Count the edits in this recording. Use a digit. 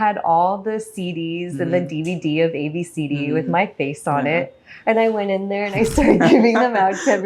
0